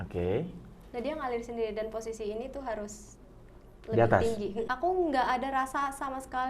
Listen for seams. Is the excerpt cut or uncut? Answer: cut